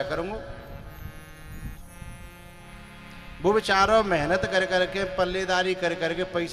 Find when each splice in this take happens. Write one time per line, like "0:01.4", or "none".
none